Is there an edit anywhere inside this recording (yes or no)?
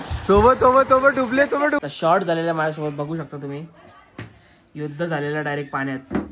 yes